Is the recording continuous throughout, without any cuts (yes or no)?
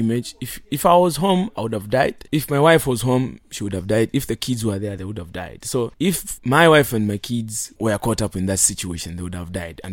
no